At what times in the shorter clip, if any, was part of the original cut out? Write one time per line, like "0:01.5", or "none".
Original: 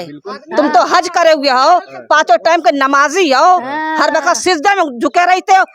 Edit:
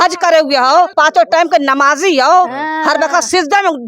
0:00.9